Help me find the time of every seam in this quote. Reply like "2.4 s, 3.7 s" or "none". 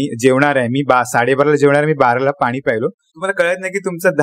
3.2 s